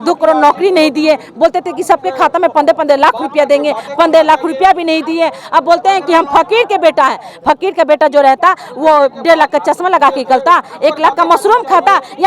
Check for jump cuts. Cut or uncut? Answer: uncut